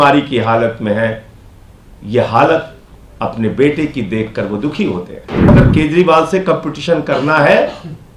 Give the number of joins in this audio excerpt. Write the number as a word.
one